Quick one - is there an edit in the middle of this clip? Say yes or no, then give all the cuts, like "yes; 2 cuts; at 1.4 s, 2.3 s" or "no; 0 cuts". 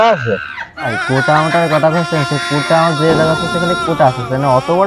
no; 0 cuts